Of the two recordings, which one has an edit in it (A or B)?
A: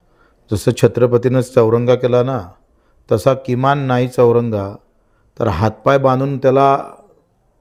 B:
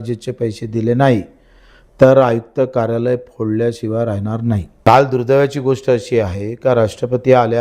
B